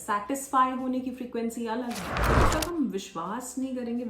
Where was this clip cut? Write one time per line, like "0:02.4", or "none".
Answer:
0:02.3